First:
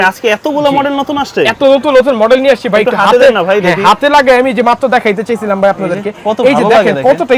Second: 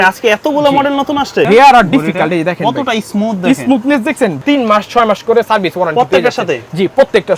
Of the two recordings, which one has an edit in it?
second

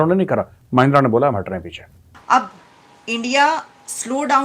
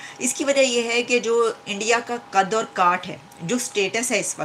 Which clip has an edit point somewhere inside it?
first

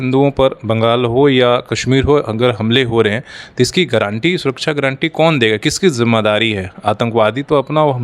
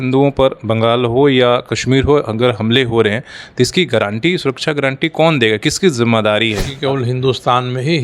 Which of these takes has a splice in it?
second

